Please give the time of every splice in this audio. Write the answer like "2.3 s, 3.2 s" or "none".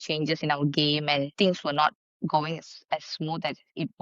1.3 s

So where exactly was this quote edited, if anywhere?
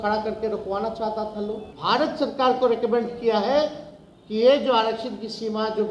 1.7 s

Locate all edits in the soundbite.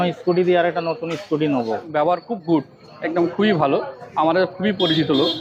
1.9 s

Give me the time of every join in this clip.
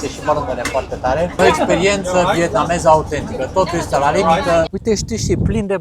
1.4 s, 4.7 s

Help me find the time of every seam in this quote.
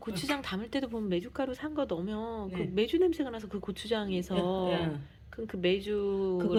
none

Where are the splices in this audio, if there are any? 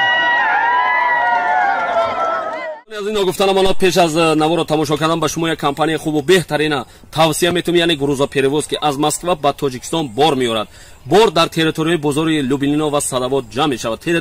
2.5 s

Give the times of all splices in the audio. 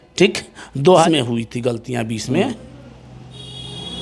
1.0 s

